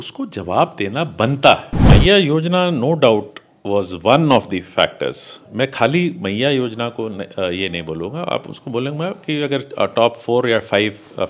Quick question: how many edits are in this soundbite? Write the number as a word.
one